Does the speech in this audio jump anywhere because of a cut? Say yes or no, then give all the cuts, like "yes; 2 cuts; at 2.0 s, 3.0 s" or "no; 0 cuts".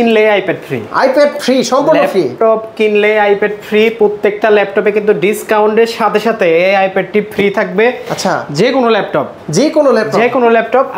no; 0 cuts